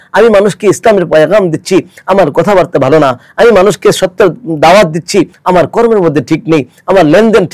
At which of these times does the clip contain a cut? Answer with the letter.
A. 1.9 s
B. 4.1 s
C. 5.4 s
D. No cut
C